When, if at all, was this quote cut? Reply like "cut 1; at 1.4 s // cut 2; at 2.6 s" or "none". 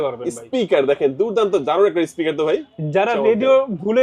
none